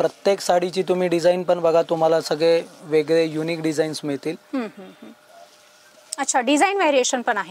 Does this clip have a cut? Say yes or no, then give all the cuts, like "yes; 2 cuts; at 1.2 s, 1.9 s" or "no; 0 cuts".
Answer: no; 0 cuts